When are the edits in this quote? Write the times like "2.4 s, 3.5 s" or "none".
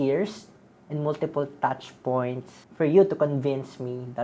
2.6 s